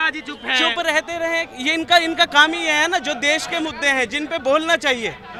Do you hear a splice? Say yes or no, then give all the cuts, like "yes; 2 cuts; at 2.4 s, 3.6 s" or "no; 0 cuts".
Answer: no; 0 cuts